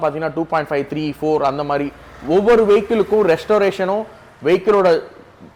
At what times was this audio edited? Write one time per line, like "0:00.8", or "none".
none